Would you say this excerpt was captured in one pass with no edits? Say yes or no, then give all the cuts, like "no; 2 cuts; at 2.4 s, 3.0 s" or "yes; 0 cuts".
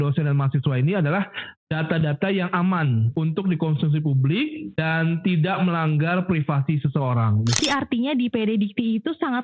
no; 3 cuts; at 3.1 s, 4.6 s, 7.6 s